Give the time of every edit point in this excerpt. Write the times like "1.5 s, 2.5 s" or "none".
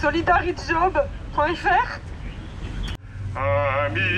3.1 s